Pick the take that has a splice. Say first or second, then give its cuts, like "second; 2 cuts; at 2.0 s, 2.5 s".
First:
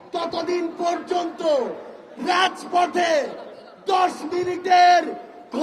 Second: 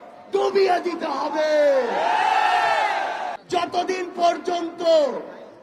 second; 1 cut; at 3.4 s